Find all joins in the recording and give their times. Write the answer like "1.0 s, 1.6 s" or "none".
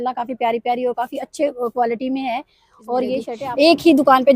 3.3 s